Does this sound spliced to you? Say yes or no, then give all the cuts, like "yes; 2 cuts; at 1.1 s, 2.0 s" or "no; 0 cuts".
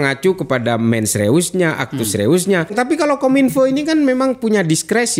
yes; 1 cut; at 2.7 s